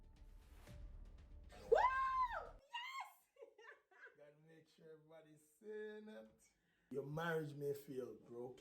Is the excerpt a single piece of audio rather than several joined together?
no; 1 cut; at 6.9 s

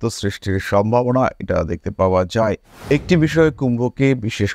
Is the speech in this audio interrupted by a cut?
yes; 1 cut; at 2.7 s

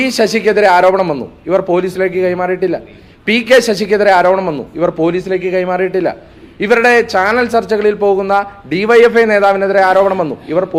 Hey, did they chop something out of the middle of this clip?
no; 0 cuts

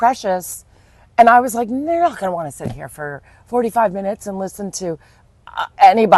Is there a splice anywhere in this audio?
no; 0 cuts

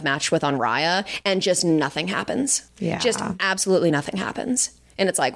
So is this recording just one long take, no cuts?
no; 1 cut; at 2.7 s

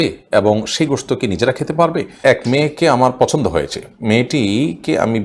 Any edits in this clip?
yes; 1 cut; at 2.2 s

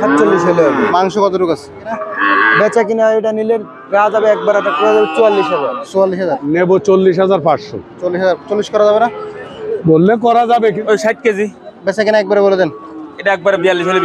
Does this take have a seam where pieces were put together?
yes; 3 cuts; at 2.1 s, 6.4 s, 10.8 s

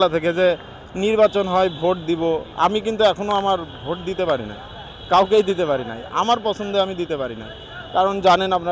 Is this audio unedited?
yes; 0 cuts

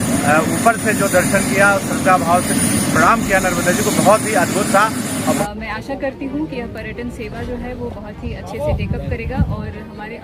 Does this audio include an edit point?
yes; 1 cut; at 5.4 s

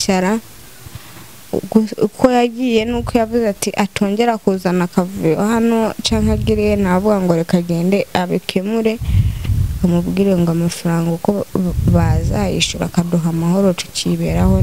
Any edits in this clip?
no; 0 cuts

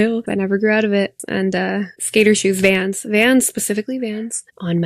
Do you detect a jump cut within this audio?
yes; 1 cut; at 1.2 s

